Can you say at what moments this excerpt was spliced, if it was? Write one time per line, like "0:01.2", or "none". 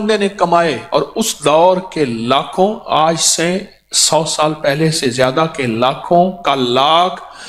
none